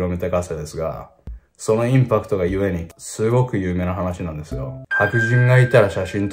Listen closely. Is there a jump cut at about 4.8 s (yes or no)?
yes